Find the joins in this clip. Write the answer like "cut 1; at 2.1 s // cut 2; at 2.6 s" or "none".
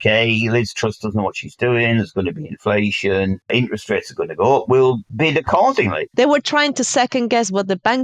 cut 1; at 3.5 s // cut 2; at 5.1 s // cut 3; at 6.0 s